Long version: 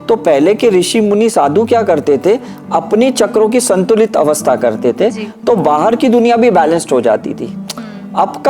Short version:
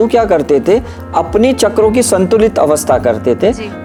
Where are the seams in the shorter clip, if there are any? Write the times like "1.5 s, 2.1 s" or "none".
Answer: none